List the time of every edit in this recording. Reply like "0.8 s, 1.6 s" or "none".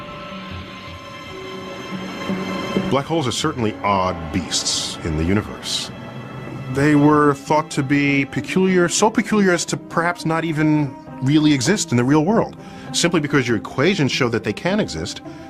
none